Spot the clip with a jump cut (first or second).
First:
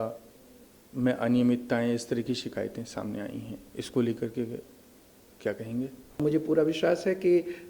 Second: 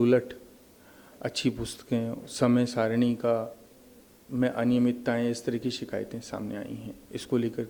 first